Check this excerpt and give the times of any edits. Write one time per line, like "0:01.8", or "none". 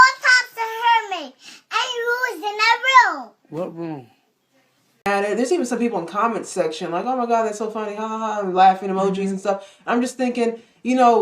0:05.1